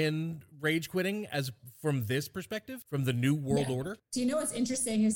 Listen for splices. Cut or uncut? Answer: cut